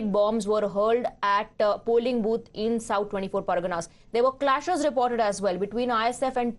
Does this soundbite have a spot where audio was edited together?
yes; 1 cut; at 4.6 s

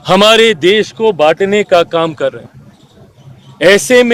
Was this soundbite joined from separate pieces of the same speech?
no; 0 cuts

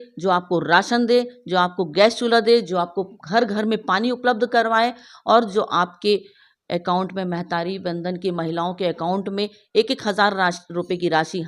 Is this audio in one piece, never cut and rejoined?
yes; 0 cuts

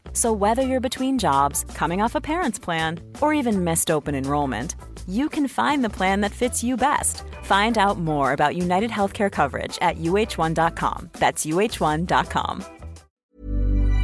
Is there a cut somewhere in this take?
yes; 1 cut; at 13.1 s

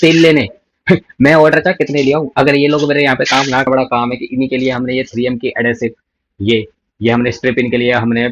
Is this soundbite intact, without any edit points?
no; 1 cut; at 3.7 s

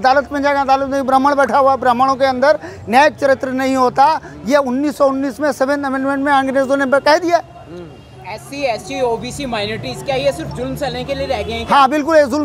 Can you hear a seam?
no; 0 cuts

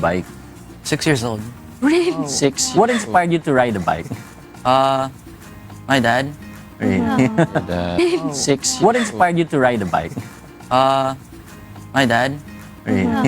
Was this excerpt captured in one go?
no; 1 cut; at 8.0 s

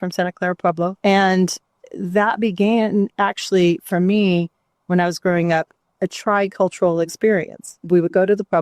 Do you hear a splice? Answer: yes; 2 cuts; at 1.0 s, 7.8 s

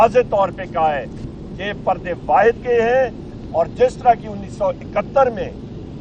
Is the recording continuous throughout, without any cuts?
yes; 0 cuts

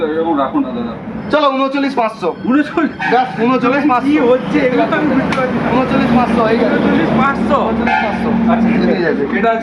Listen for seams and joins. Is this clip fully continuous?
yes; 0 cuts

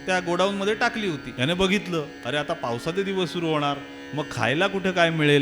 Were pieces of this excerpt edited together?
yes; 1 cut; at 1.3 s

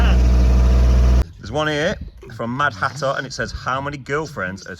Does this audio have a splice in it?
yes; 1 cut; at 1.2 s

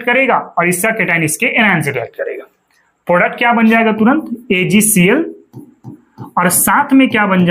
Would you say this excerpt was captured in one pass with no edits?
yes; 0 cuts

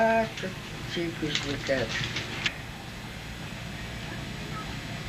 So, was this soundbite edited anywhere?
no; 0 cuts

